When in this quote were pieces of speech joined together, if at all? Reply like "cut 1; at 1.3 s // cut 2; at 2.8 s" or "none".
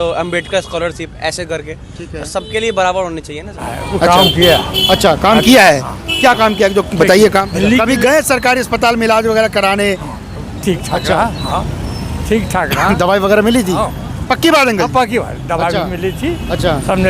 cut 1; at 3.8 s // cut 2; at 7.5 s